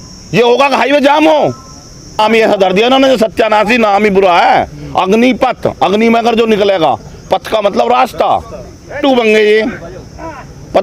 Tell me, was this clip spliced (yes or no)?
yes